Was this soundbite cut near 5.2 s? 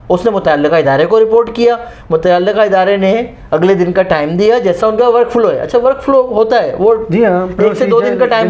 no; 0 cuts

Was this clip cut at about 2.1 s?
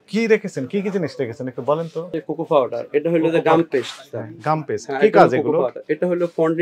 yes; 1 cut; at 2.1 s

